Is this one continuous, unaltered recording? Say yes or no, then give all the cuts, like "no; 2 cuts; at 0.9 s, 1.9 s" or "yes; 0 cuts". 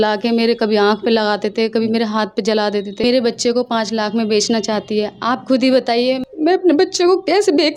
no; 2 cuts; at 3.0 s, 6.2 s